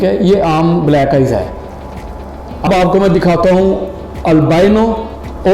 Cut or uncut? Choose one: cut